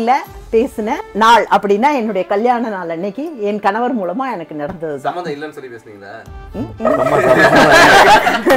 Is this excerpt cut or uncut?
cut